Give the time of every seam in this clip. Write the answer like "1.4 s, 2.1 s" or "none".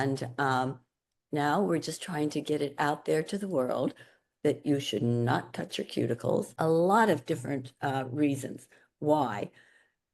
6.5 s